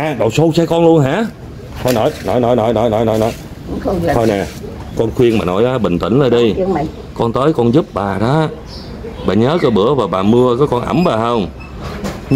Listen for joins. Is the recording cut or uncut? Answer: uncut